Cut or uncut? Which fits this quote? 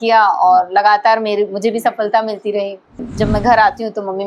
cut